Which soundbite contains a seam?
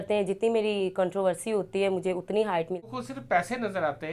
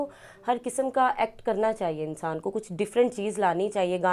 first; 1 cut; at 2.8 s

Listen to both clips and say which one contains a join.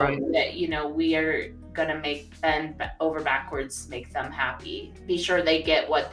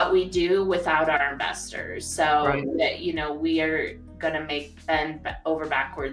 first; 1 cut; at 4.9 s

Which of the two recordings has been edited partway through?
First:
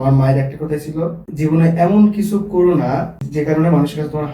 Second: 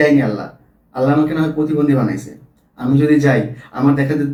first; 2 cuts; at 1.3 s, 3.2 s

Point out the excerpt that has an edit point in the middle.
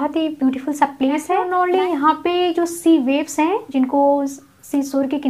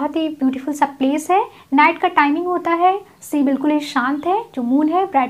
first; 1 cut; at 1.5 s

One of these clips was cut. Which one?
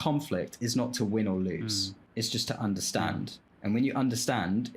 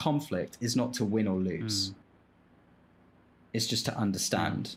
first; 2 cuts; at 2.0 s, 3.4 s

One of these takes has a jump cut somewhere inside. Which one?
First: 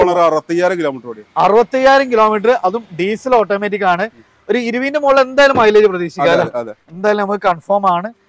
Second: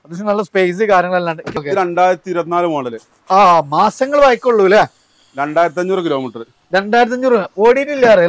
second; 1 cut; at 1.5 s

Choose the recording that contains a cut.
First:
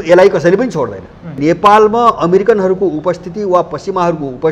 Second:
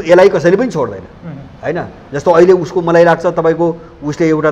first; 1 cut; at 1.4 s

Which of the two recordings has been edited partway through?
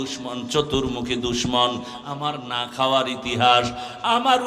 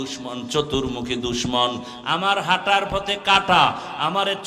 first; 1 cut; at 1.9 s

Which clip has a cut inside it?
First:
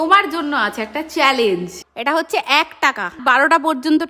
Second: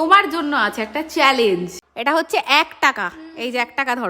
first; 1 cut; at 3.2 s

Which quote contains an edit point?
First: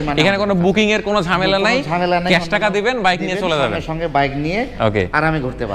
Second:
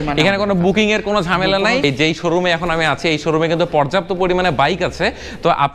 second; 1 cut; at 1.8 s

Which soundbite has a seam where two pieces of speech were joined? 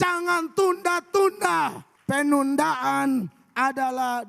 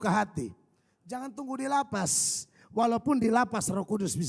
first; 1 cut; at 1.9 s

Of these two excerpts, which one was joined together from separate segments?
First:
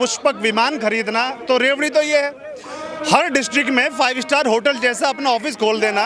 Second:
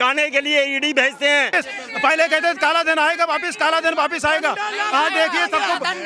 second; 1 cut; at 1.5 s

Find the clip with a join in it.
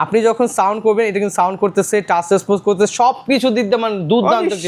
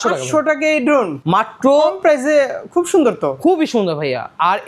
second; 1 cut; at 1.2 s

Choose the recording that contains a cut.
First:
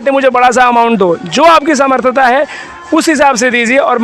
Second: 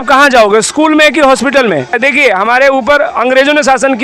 second; 1 cut; at 2.0 s

